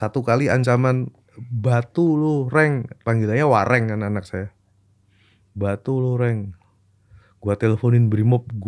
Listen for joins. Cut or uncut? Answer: uncut